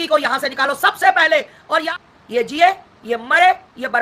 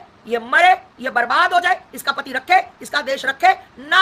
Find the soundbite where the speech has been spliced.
first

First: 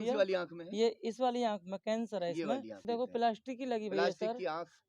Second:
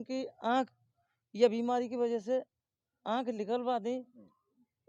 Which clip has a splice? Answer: first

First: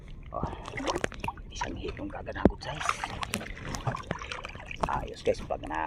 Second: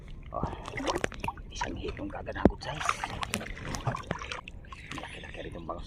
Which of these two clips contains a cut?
second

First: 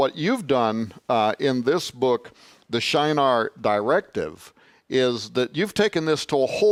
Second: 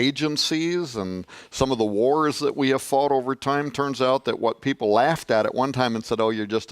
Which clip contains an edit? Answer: second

